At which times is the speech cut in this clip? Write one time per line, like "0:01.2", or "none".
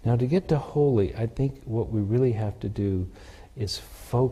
none